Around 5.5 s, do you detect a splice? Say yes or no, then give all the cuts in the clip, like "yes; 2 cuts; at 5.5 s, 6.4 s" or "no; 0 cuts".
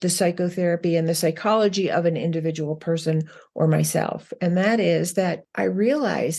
yes; 1 cut; at 5.5 s